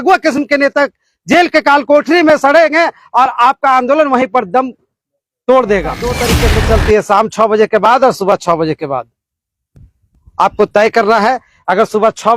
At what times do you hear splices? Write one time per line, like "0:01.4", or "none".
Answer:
0:06.2